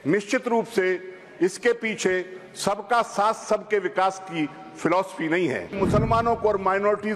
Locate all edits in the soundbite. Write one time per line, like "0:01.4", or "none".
0:05.8